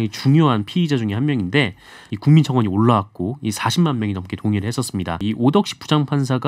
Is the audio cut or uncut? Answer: cut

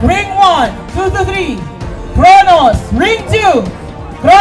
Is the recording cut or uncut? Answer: uncut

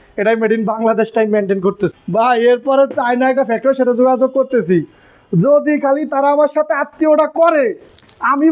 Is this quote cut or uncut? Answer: cut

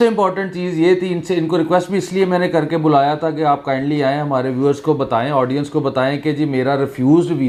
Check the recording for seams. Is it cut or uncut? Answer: uncut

